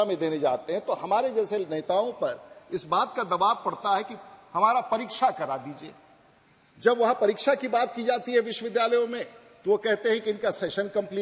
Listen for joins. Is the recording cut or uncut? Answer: uncut